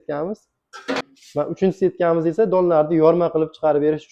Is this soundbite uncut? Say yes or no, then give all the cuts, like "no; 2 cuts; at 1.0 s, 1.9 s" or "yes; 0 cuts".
no; 1 cut; at 1.1 s